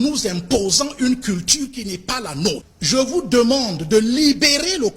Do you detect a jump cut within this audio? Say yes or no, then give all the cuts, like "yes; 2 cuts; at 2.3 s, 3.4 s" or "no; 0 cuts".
yes; 1 cut; at 2.7 s